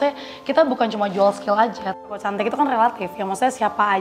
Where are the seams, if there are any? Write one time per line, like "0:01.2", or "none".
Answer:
0:02.1